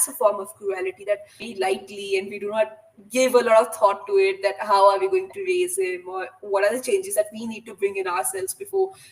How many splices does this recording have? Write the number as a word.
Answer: one